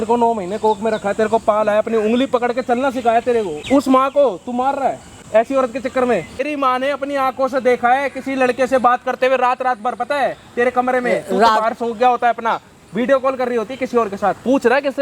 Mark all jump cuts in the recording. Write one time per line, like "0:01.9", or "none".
0:03.6
0:05.1
0:06.5